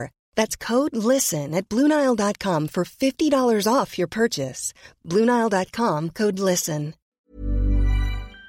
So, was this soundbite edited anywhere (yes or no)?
yes